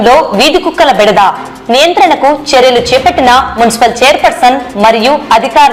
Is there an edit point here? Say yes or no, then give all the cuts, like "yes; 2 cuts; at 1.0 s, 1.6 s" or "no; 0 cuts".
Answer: no; 0 cuts